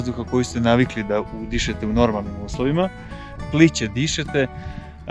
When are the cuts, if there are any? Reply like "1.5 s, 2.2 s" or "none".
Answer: none